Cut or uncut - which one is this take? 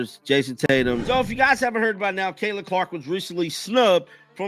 cut